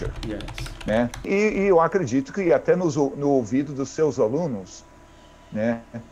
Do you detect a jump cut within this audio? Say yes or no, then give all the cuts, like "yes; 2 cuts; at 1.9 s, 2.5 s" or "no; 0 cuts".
yes; 1 cut; at 1.3 s